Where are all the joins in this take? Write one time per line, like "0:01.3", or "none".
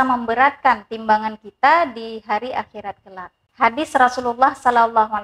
0:03.5